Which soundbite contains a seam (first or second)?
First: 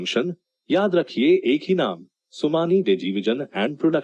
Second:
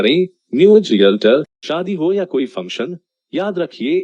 second